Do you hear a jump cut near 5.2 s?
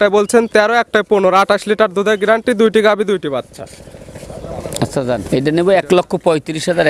yes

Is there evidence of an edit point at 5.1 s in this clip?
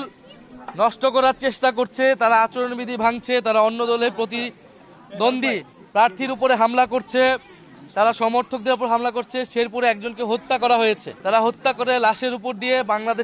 no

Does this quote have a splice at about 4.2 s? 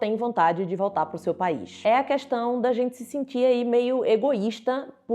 no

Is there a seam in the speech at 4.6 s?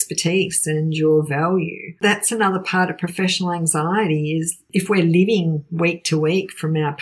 yes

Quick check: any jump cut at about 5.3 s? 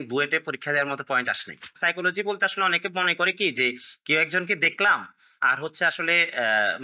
no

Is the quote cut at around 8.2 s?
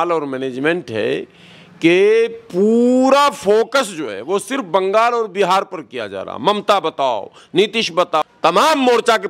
yes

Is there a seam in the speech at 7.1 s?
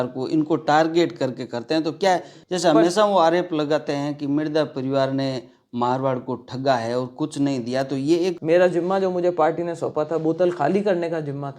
no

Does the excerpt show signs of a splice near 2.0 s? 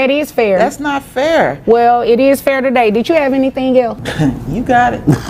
no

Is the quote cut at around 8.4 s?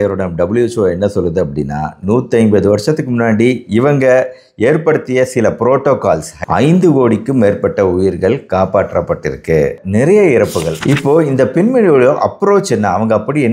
no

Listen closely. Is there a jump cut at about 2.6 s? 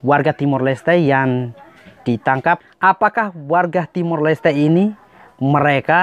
yes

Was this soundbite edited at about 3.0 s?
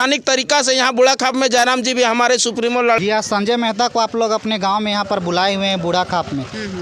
yes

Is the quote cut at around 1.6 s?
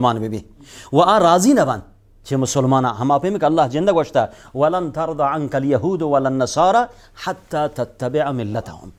no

